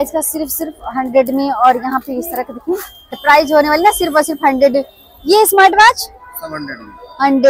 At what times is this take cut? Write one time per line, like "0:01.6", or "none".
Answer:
0:03.2

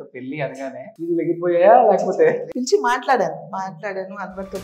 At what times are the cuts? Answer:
0:00.9
0:02.5

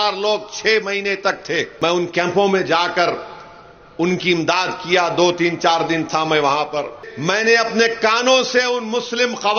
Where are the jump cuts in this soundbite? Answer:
0:01.7
0:07.1

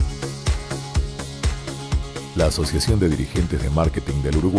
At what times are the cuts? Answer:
0:01.9

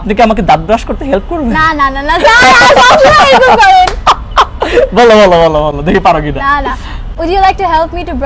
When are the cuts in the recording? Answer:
none

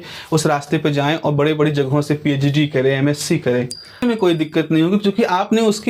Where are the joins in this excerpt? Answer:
0:04.0

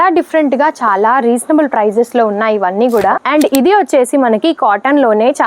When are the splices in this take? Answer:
0:03.2

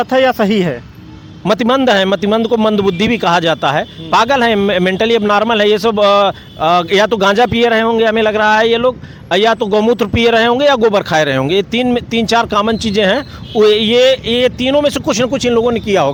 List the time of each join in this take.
none

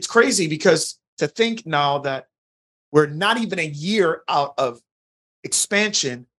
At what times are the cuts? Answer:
none

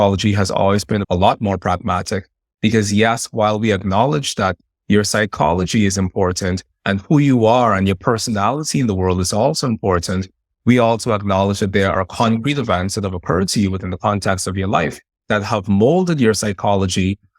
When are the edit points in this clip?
0:01.0

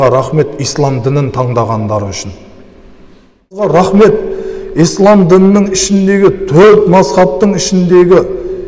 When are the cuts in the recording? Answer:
0:03.7

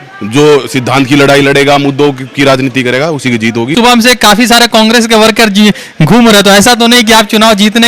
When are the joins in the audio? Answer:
0:03.7

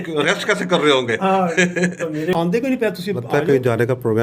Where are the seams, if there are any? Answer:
0:02.5

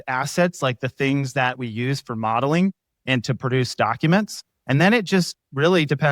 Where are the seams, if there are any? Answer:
0:04.5

